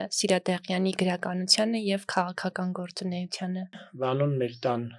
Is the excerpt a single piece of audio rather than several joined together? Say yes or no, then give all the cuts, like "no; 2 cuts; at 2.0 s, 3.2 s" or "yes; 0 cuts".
no; 1 cut; at 3.9 s